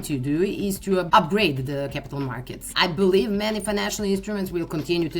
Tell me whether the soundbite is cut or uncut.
cut